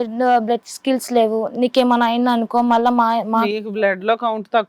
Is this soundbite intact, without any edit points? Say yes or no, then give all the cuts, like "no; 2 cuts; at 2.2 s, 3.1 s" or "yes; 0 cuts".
yes; 0 cuts